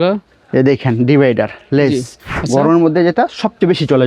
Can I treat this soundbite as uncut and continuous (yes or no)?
no